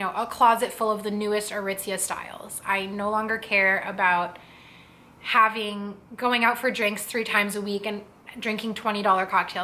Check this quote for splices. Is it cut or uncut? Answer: uncut